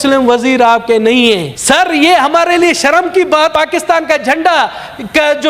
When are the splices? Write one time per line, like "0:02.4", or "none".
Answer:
0:01.5
0:03.5